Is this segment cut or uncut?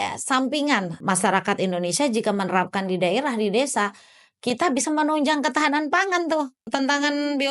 cut